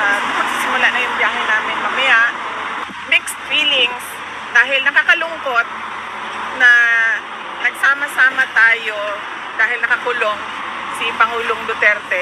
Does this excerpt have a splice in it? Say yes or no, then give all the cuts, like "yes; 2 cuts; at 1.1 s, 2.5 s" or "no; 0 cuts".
yes; 1 cut; at 2.8 s